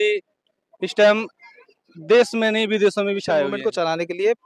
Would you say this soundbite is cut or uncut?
cut